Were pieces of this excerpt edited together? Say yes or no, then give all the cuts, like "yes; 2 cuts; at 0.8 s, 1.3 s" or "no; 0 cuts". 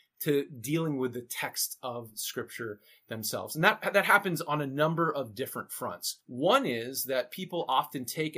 no; 0 cuts